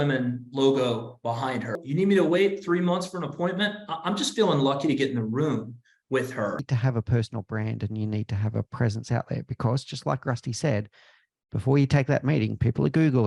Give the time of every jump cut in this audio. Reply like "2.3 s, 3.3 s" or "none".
1.7 s, 6.7 s